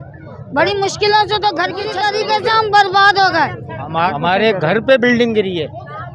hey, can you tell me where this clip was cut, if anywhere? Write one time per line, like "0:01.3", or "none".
0:01.9
0:03.9